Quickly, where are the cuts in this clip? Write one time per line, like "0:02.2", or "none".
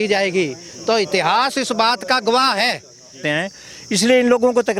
0:03.2

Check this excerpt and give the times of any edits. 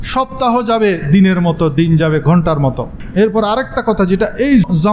0:03.0

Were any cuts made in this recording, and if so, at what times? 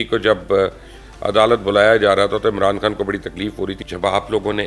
0:03.8

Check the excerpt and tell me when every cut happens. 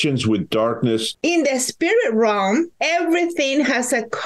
0:01.1
0:02.8

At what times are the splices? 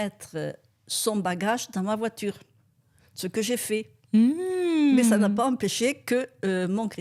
none

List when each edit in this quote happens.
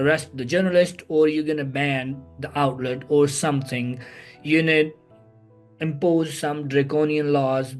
none

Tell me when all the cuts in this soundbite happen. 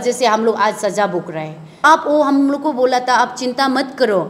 0:01.8

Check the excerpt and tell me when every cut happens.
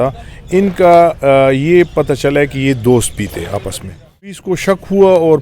0:04.4

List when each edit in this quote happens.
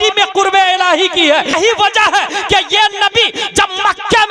0:01.5

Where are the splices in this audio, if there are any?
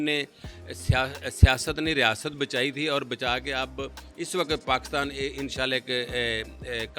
none

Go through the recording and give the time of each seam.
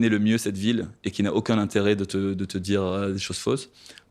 none

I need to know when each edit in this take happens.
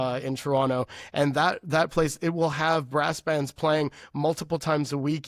none

